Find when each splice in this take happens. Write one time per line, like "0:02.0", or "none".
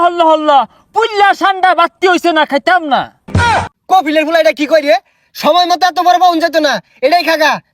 0:03.4